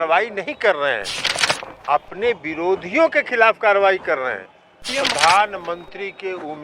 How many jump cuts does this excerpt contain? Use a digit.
1